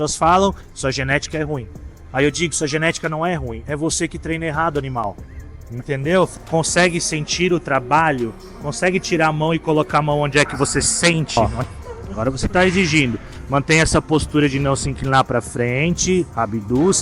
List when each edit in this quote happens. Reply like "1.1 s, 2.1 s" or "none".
6.3 s, 11.4 s